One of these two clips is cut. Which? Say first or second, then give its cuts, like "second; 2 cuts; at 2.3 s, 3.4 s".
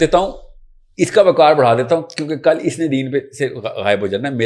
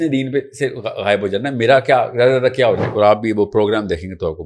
second; 1 cut; at 2.9 s